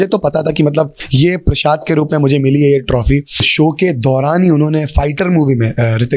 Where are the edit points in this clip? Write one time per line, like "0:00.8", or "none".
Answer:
0:01.0
0:03.5